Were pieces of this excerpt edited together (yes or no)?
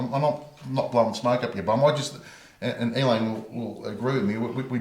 no